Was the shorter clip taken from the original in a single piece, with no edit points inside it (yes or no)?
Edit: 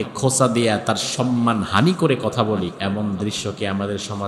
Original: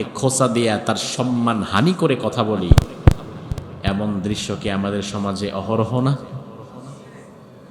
no